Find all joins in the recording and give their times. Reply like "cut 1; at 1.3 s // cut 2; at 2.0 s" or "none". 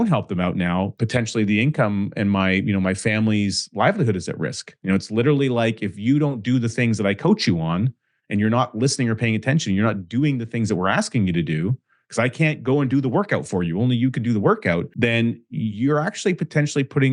cut 1; at 1.0 s // cut 2; at 4.8 s // cut 3; at 14.9 s